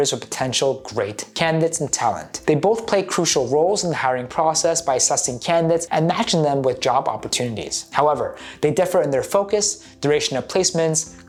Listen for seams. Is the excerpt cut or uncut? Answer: uncut